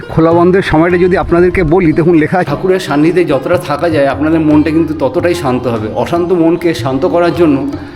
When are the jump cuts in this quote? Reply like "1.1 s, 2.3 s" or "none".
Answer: 2.5 s